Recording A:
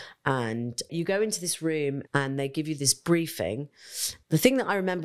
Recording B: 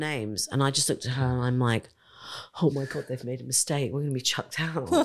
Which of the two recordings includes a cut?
A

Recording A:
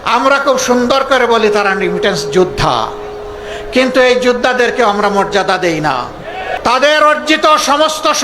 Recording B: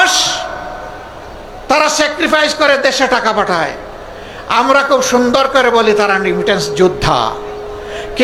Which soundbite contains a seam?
A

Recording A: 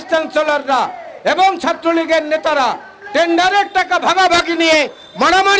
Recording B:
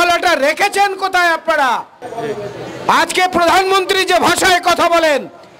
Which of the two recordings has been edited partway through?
B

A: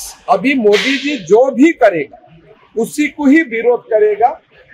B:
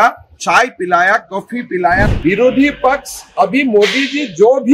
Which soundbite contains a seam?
B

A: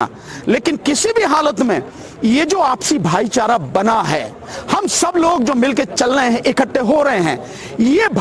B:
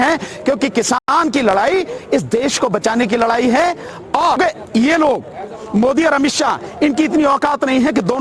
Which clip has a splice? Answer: B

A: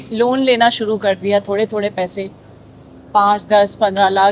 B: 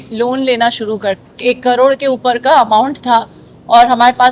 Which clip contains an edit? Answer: B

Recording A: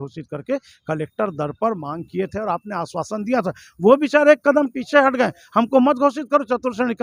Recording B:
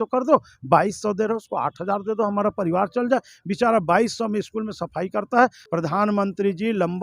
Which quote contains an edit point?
B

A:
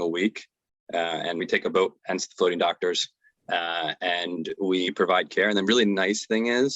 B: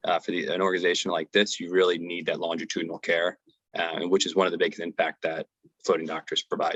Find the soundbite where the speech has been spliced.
A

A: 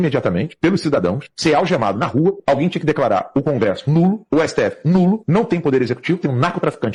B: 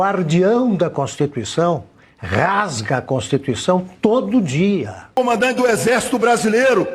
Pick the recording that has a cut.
B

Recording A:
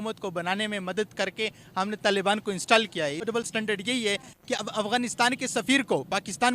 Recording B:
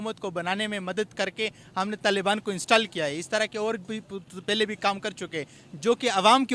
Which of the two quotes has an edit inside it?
A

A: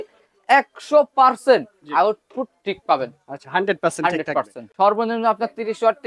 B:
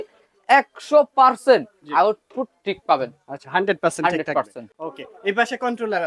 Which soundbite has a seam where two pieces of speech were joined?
A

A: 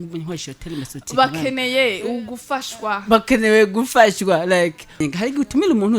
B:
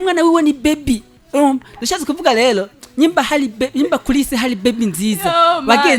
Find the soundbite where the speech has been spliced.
A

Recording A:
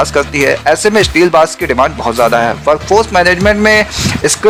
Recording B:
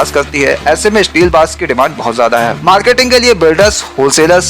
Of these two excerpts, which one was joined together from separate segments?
B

